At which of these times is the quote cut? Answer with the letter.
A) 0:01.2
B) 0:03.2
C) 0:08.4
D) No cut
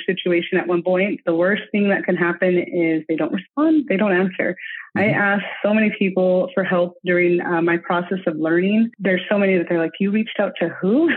A